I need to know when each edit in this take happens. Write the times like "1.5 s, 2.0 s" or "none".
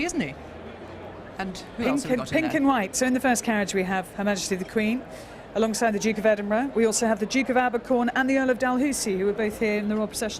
none